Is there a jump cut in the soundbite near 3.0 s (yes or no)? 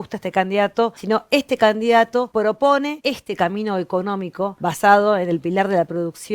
yes